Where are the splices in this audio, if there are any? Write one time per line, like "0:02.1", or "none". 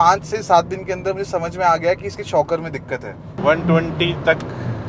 0:03.3